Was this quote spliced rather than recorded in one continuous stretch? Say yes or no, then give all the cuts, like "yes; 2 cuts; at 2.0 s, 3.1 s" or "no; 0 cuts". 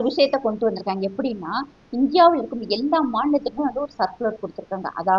no; 0 cuts